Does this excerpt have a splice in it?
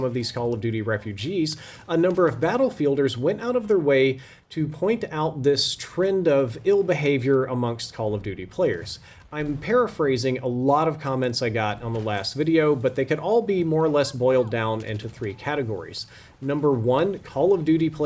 no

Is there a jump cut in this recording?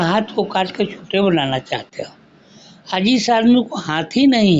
no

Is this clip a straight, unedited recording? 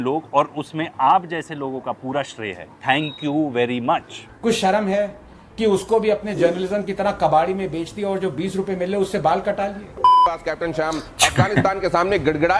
yes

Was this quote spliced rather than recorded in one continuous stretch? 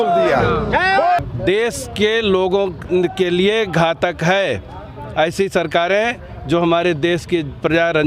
yes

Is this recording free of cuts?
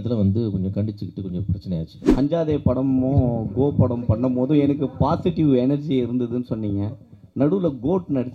no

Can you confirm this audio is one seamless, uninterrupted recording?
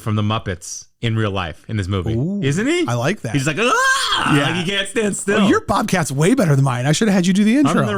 yes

